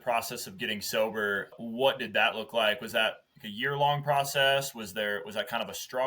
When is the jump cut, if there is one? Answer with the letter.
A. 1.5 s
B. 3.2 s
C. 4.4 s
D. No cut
A